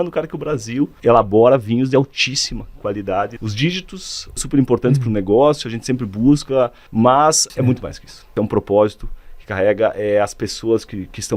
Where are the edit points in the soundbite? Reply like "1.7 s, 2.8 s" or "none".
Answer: 0.9 s, 3.4 s, 4.4 s, 6.8 s, 7.8 s